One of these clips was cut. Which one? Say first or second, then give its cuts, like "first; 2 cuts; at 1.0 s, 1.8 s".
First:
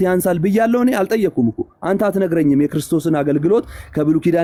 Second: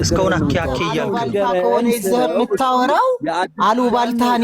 second; 1 cut; at 1.0 s